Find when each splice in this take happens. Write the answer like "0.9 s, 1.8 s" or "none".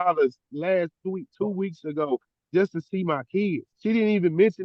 3.7 s